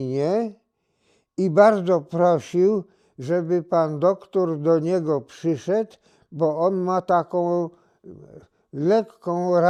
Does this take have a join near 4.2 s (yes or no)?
no